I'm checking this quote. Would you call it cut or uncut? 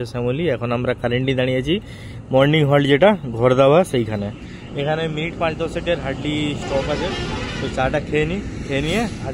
uncut